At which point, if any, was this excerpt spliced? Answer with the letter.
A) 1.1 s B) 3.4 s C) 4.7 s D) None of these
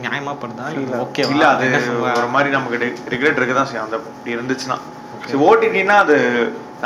D